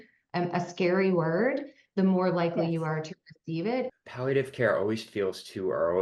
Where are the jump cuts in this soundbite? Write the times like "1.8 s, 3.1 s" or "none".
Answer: 3.9 s